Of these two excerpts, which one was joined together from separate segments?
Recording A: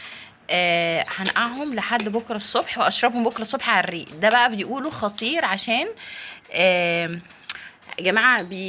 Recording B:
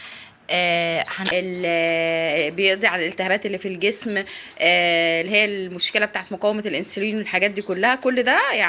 B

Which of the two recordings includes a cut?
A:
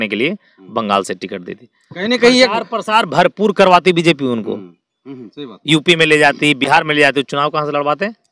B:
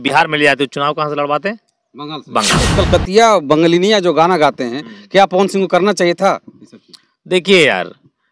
B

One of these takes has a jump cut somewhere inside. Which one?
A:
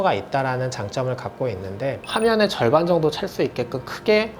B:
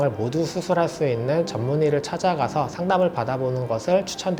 A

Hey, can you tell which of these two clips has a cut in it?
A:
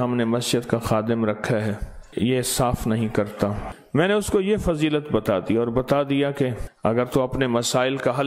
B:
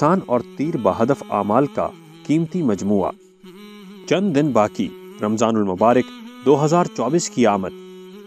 A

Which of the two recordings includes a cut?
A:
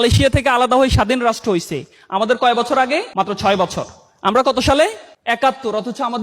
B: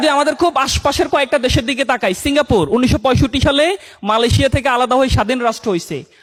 A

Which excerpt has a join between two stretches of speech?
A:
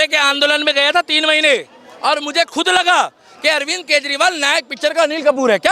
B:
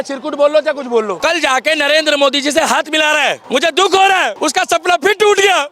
B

